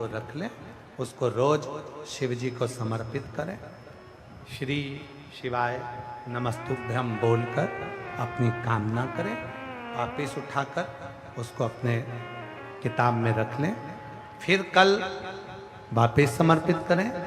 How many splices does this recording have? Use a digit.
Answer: 0